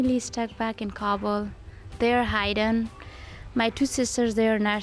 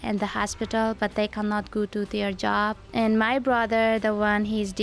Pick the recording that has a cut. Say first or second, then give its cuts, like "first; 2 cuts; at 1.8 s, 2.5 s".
second; 1 cut; at 2.8 s